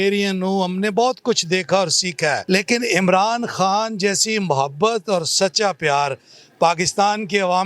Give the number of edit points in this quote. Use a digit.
1